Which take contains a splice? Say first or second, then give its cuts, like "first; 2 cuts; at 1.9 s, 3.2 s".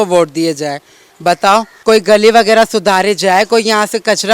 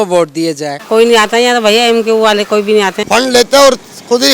second; 2 cuts; at 0.8 s, 3.0 s